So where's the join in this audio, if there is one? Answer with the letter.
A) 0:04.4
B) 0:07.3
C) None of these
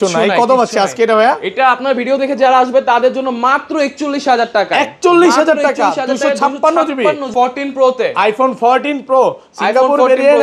B